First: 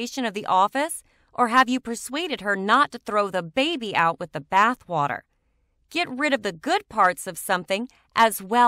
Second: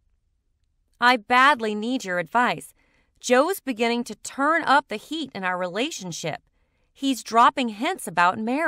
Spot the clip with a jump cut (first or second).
second